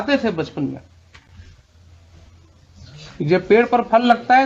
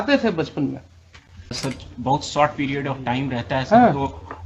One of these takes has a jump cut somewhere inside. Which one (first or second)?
second